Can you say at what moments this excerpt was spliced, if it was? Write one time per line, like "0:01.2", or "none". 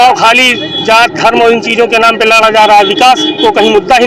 none